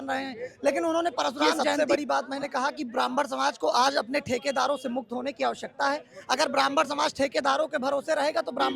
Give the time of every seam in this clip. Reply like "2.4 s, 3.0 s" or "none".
1.8 s